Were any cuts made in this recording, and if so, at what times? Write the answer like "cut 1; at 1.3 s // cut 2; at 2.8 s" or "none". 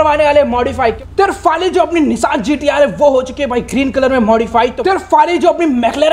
cut 1; at 1.0 s // cut 2; at 4.8 s